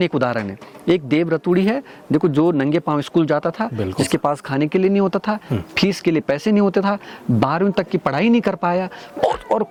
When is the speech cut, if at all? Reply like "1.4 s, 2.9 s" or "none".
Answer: none